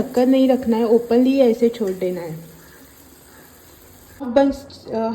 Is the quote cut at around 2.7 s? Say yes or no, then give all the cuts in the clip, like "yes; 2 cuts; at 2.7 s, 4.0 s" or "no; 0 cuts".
no; 1 cut; at 4.2 s